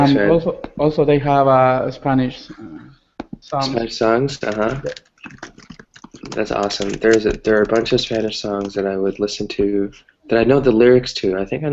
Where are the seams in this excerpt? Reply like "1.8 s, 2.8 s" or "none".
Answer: 4.1 s